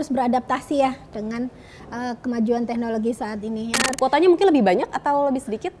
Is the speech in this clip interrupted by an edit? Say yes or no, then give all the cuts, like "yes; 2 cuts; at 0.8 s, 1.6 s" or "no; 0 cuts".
yes; 1 cut; at 3.8 s